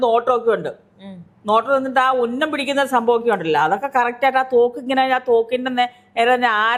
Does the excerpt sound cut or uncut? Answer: uncut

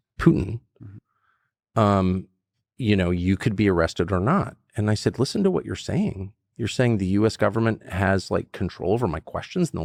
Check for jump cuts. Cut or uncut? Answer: uncut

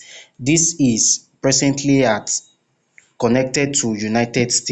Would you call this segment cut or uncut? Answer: uncut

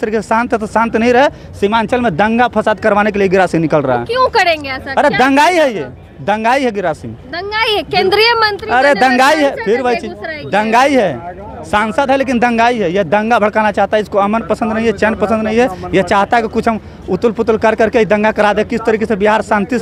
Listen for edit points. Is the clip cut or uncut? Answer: uncut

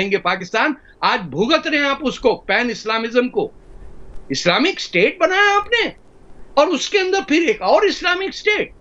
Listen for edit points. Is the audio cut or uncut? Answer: uncut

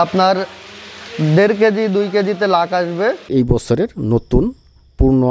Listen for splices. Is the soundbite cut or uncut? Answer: cut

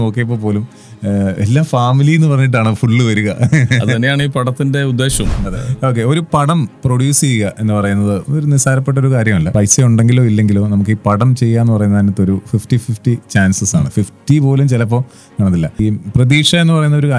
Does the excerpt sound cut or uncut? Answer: cut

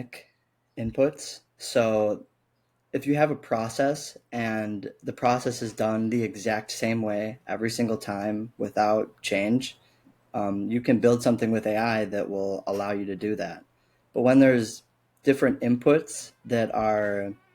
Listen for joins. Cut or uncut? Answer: uncut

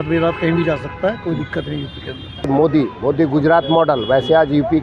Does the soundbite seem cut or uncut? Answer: cut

